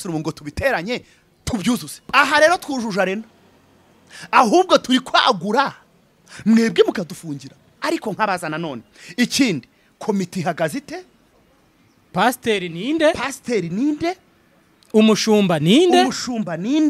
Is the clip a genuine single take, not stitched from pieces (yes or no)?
no